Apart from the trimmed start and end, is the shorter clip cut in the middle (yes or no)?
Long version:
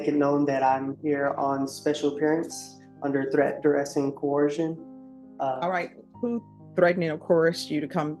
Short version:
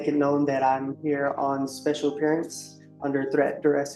no